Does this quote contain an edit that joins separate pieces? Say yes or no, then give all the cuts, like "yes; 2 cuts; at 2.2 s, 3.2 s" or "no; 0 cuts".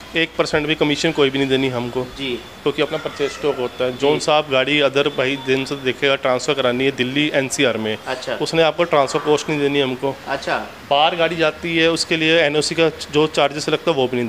no; 0 cuts